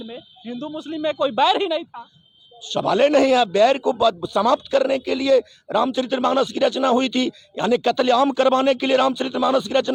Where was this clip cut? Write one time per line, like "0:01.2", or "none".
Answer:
none